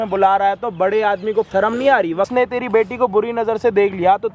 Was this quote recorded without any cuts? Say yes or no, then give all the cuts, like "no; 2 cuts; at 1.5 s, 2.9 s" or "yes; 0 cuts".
no; 2 cuts; at 1.5 s, 2.3 s